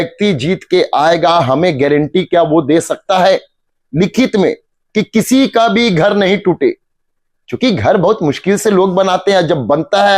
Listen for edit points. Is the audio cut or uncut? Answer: uncut